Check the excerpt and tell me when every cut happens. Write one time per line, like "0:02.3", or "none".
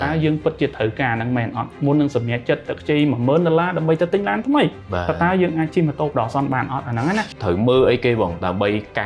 0:07.3

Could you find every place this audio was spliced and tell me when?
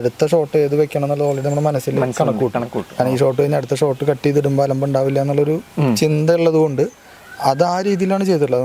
none

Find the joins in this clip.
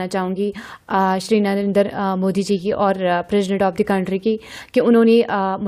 none

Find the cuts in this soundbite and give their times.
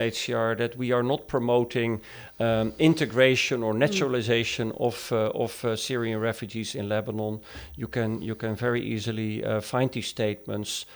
none

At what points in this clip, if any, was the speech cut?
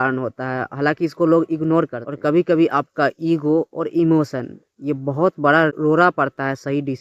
0:02.0
0:05.8

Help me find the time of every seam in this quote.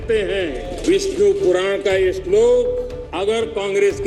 0:00.8
0:03.0

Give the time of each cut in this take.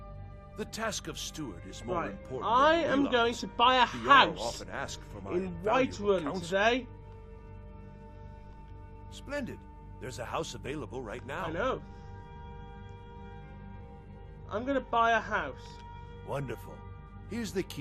0:11.2

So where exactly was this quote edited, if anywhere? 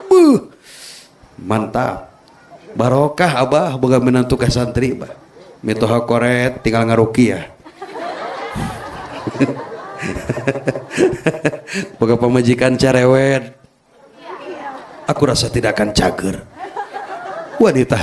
none

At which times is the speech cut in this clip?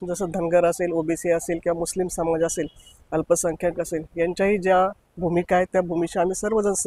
none

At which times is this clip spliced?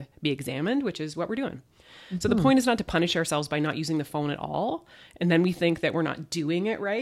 none

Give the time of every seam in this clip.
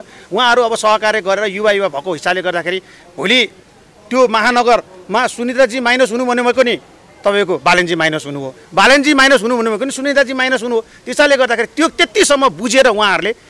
none

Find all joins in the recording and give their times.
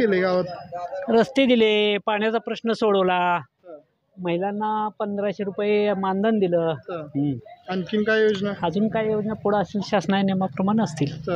none

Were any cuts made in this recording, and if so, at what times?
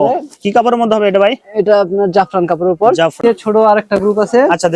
0:03.2

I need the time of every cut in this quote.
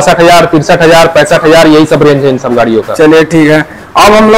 none

